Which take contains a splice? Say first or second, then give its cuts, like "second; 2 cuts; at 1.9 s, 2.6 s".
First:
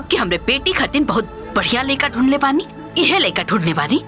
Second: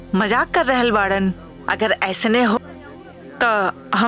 second; 1 cut; at 2.6 s